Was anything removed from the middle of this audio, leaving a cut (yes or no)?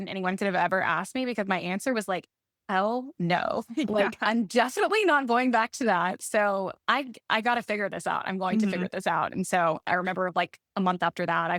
no